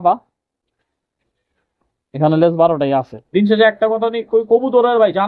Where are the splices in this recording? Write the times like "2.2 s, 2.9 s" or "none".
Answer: 3.2 s